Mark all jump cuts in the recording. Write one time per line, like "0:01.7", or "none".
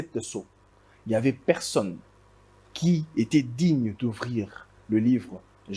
none

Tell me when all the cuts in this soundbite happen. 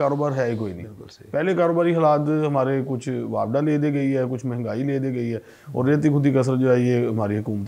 none

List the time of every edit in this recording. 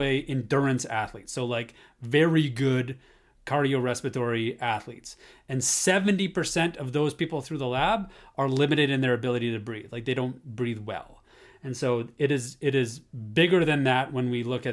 none

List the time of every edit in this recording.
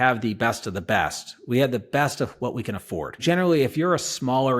0:03.2

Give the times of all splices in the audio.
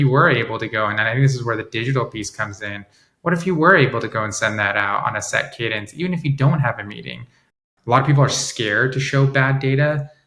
0:07.6

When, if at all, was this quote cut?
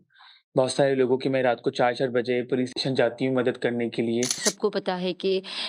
0:04.5

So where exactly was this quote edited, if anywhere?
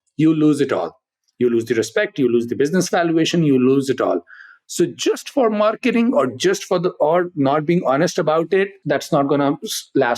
0:08.8

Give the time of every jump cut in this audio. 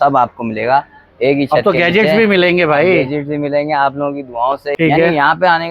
0:04.7

